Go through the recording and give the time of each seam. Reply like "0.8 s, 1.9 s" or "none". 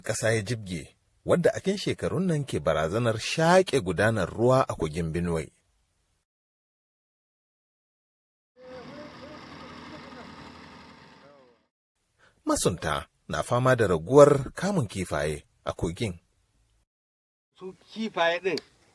1.6 s